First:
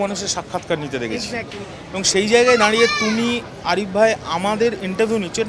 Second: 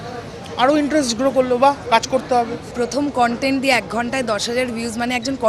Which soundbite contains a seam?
second; 1 cut; at 2.7 s

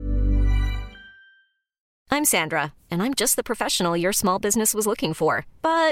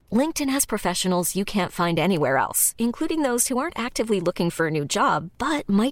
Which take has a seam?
first; 1 cut; at 1.9 s

